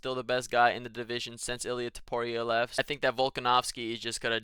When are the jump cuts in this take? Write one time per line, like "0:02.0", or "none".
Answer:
0:02.7

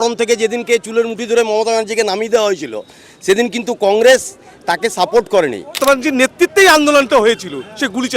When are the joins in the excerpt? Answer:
0:05.8

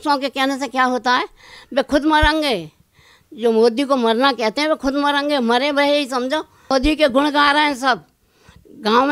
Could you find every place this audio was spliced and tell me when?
0:06.7

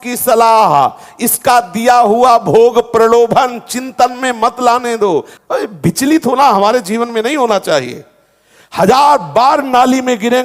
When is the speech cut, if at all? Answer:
0:05.3

